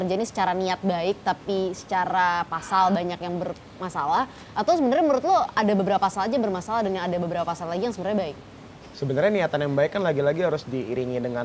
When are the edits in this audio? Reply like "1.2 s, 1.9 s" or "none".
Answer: none